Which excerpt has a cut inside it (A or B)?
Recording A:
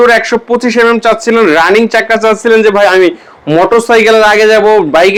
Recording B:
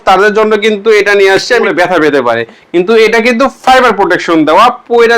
B